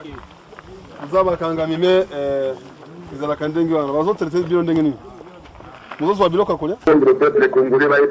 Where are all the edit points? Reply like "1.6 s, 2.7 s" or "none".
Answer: 6.9 s